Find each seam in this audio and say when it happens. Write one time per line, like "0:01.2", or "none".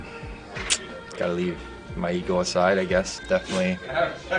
0:03.2